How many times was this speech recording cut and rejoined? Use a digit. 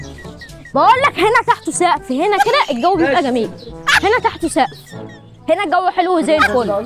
0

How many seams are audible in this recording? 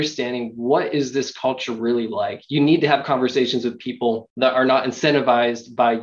1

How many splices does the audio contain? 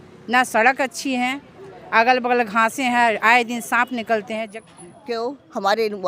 1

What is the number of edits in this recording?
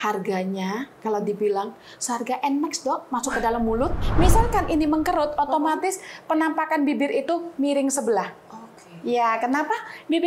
1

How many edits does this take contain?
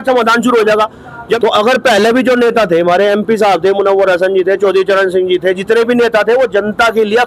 1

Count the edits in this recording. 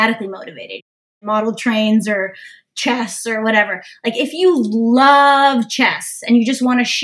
1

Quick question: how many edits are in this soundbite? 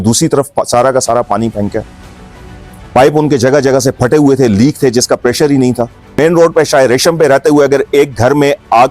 1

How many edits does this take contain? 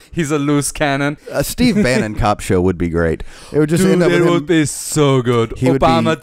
1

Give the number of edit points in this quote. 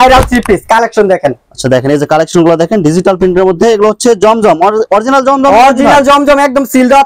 0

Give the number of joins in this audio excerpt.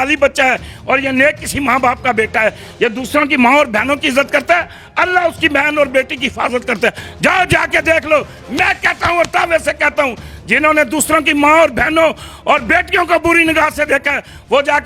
0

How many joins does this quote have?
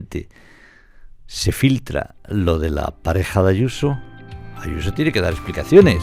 0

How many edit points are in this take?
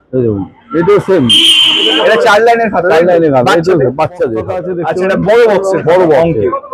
1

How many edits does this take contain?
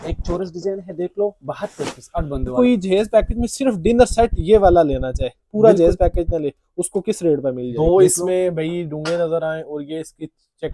2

